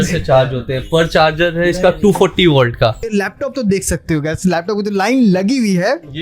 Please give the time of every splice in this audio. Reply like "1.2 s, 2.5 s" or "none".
3.1 s